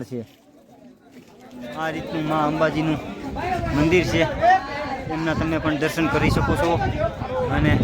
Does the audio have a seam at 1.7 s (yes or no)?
yes